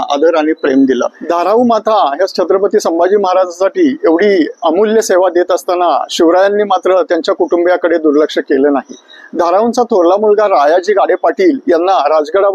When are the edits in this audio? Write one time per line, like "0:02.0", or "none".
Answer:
0:01.2